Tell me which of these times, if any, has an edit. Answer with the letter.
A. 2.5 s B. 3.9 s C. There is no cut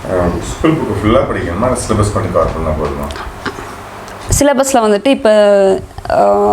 B